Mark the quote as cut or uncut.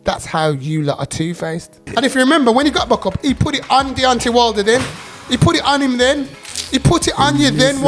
cut